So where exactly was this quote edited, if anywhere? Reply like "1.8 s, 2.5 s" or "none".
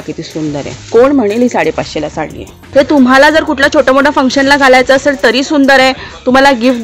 2.6 s